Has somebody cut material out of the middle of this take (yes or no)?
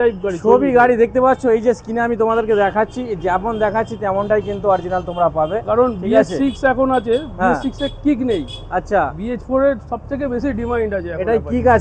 no